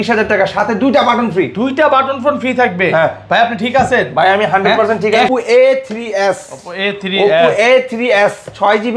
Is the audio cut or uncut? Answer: cut